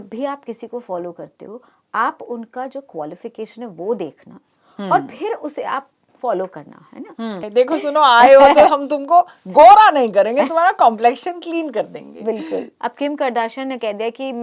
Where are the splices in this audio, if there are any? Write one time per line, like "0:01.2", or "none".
0:07.4
0:12.7